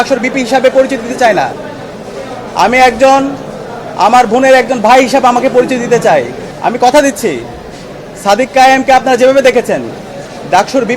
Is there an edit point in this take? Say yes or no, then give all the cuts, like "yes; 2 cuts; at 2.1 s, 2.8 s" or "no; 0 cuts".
yes; 1 cut; at 6.4 s